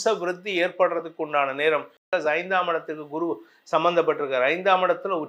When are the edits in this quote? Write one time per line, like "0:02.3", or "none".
0:02.0